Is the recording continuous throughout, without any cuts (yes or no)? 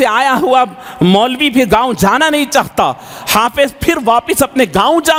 yes